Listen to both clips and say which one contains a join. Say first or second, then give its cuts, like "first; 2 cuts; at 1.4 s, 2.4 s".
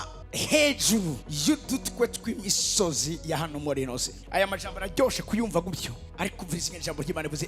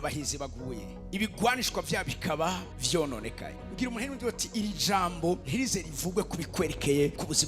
second; 1 cut; at 1.0 s